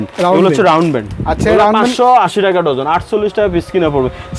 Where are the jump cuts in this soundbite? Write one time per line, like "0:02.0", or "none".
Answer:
none